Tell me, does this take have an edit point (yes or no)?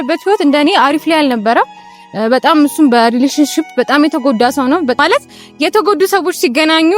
yes